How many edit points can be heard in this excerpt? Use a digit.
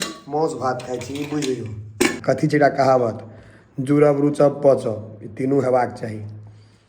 1